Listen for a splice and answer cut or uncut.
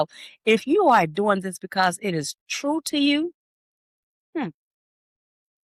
uncut